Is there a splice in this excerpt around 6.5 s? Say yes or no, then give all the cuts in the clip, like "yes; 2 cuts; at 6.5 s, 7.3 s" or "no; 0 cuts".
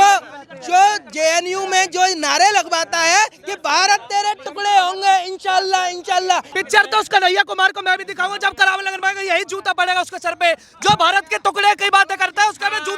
yes; 1 cut; at 6.5 s